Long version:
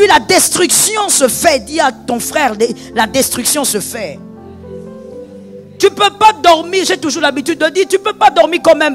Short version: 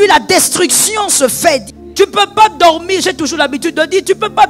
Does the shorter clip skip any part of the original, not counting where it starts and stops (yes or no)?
yes